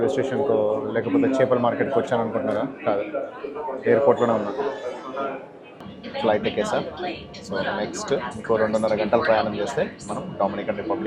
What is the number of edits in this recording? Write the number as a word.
one